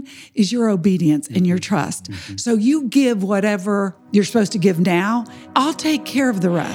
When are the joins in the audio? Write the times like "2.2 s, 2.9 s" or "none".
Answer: 4.0 s, 5.4 s